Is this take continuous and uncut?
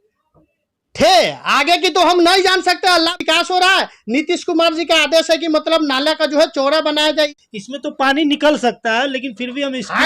no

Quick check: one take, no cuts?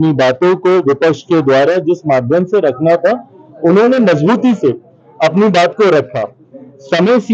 yes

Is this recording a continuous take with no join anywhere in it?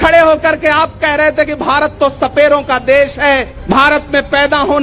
no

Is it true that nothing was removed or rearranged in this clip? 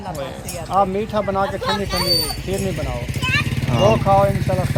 yes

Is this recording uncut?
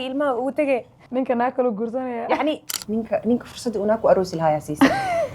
no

